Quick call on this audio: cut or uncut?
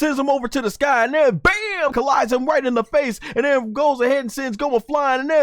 cut